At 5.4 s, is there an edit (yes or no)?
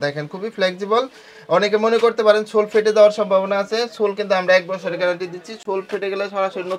no